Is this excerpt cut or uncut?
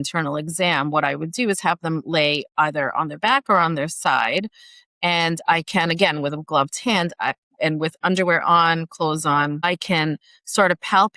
uncut